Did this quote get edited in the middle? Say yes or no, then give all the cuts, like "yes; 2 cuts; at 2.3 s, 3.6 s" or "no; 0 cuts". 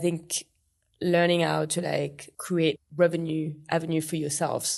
no; 0 cuts